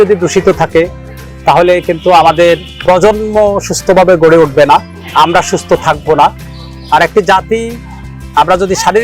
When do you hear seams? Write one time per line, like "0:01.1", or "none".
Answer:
none